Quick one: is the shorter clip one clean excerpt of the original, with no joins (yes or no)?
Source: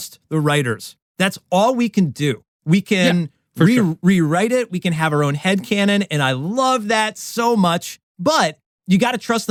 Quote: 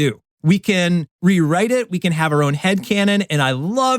no